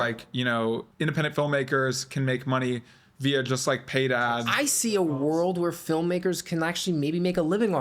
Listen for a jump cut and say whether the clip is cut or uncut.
cut